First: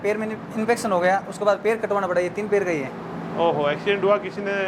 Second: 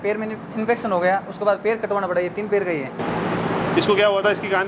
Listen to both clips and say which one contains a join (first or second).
second